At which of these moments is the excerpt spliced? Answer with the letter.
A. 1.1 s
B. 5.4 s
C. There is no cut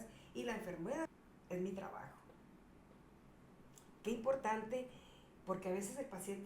A